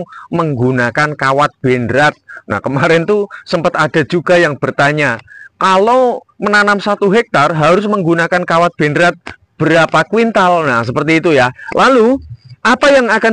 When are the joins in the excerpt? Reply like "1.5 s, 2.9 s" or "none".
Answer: 11.6 s